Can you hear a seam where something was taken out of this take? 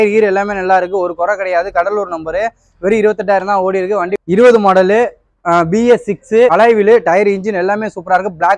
yes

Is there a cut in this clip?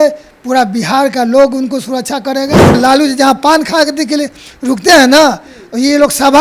yes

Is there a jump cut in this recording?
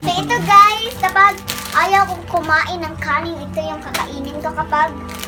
no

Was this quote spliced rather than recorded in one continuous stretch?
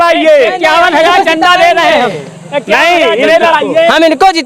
no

